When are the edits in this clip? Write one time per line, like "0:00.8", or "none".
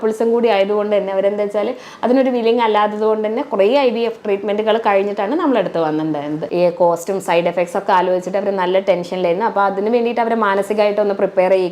0:06.5